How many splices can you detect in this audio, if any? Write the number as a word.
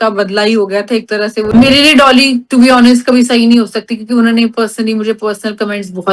one